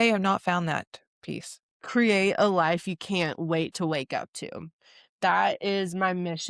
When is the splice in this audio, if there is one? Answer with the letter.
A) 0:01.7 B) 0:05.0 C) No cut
A